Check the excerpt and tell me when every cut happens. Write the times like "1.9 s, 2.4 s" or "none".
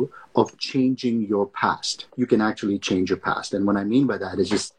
none